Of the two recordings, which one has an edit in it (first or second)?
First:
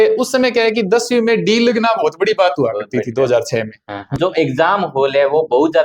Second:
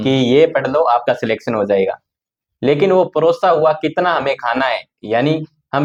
first